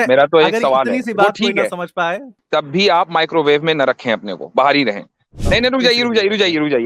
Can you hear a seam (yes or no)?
yes